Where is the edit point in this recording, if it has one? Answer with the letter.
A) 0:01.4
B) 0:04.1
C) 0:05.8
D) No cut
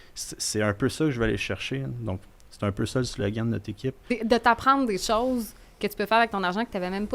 B